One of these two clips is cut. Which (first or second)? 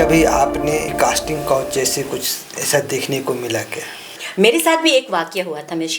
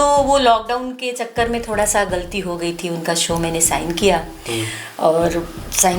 first